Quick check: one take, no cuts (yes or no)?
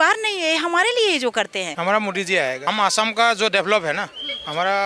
no